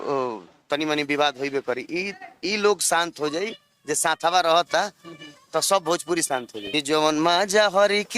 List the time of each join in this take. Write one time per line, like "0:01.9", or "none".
0:06.6